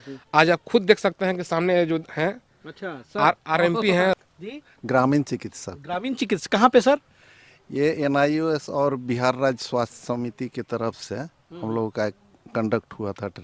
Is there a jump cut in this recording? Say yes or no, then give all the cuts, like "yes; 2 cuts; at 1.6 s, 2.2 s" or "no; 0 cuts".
yes; 1 cut; at 4.2 s